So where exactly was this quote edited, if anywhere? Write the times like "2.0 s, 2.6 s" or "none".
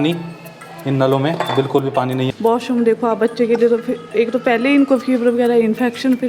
2.3 s